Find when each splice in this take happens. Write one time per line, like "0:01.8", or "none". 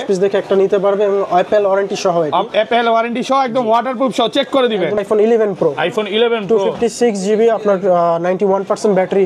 0:05.0